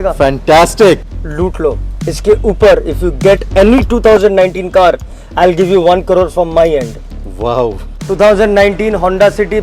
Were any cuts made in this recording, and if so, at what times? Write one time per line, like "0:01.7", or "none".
0:01.0
0:07.9